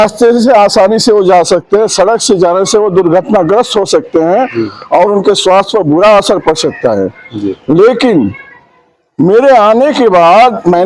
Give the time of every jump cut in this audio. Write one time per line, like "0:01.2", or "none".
none

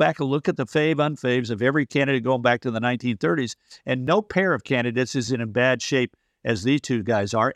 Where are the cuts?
0:04.0
0:05.3

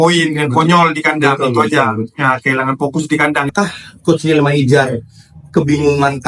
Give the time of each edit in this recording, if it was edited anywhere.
0:03.5

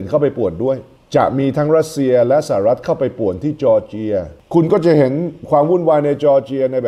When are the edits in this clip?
0:00.9

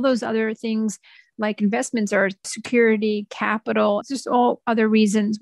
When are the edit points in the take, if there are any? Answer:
0:02.4
0:04.0

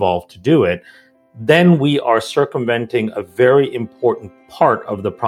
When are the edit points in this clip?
none

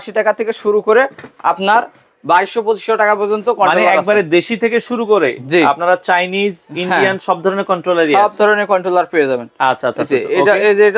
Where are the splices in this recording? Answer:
none

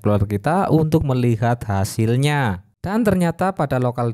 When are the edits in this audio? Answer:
0:02.7

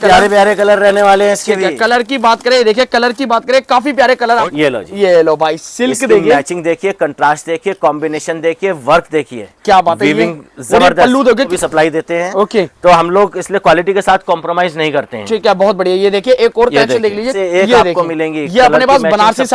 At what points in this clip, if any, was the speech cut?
0:04.5
0:11.5
0:17.3

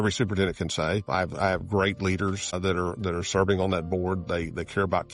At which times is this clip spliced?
0:01.0
0:02.5

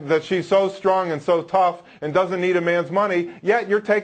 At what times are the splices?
none

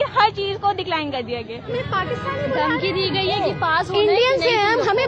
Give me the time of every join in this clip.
0:01.7

